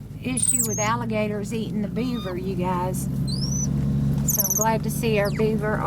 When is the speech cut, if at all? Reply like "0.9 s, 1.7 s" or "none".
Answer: none